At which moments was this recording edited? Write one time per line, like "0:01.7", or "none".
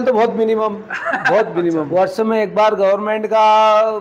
0:01.9